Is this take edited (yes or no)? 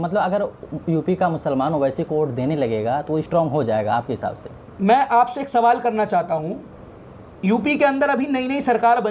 no